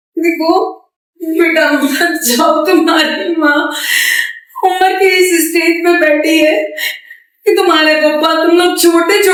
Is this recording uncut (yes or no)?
yes